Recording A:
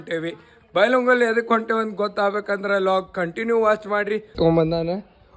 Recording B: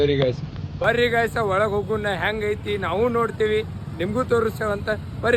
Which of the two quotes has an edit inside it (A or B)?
A